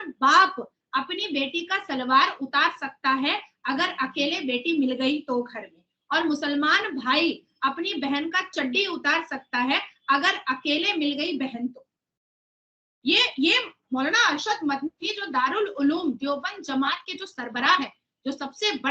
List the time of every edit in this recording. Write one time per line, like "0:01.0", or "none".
none